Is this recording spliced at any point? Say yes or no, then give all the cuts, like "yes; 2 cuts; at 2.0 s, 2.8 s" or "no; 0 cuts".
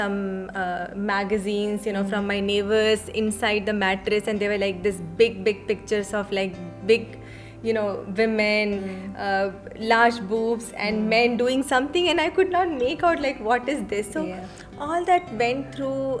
no; 0 cuts